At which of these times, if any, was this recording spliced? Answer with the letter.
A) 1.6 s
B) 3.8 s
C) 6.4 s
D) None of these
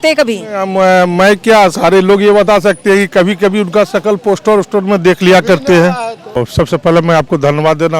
C